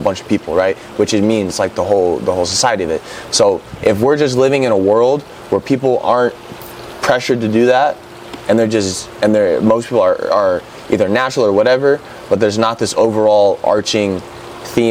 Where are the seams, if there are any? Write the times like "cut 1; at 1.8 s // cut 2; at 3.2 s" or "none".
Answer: none